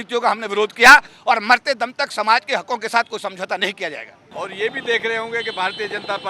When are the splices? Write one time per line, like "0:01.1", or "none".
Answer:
0:01.1
0:04.2